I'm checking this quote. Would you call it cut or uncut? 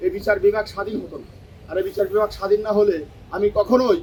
uncut